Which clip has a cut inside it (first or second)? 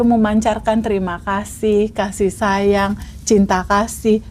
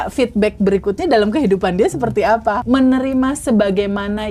second